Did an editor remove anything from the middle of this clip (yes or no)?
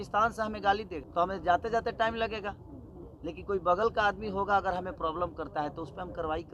yes